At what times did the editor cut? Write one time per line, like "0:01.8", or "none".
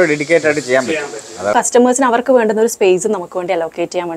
0:01.5